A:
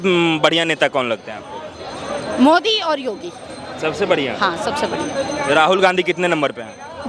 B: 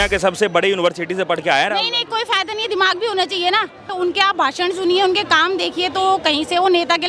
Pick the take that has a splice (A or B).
B